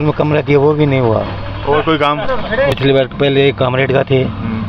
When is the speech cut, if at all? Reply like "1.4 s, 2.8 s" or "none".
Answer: 2.7 s